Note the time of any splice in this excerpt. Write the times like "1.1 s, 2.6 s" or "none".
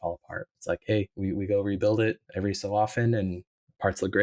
none